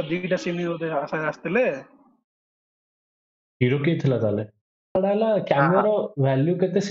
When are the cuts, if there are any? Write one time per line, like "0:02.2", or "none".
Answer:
0:04.9